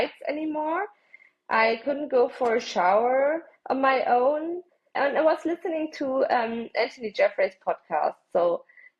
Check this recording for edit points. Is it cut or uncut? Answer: cut